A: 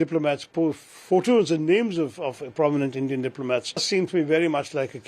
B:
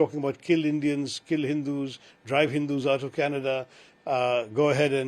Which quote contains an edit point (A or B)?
A